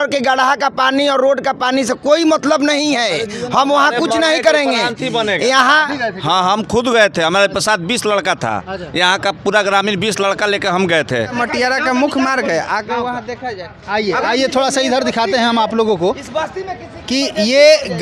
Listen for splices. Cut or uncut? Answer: cut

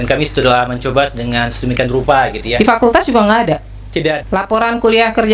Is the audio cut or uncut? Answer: cut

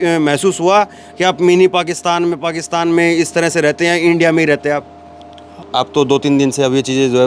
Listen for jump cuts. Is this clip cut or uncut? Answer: cut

